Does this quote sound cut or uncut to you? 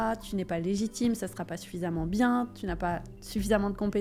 uncut